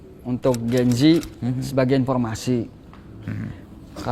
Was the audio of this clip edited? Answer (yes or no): no